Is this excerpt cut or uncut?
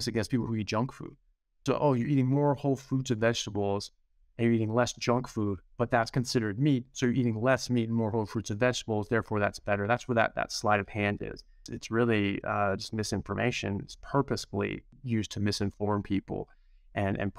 cut